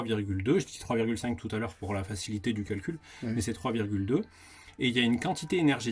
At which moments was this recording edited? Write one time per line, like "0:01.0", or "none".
none

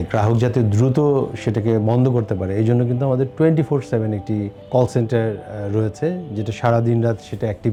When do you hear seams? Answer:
none

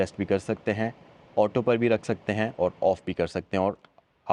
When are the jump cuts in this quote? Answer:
none

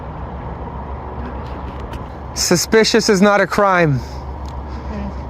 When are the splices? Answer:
0:02.1

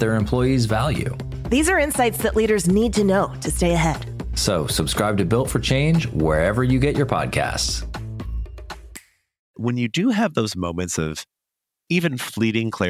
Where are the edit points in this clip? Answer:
0:09.6

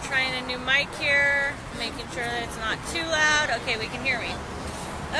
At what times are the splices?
none

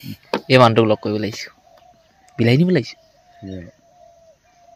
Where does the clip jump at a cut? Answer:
none

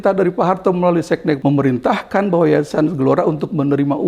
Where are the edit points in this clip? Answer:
0:01.4

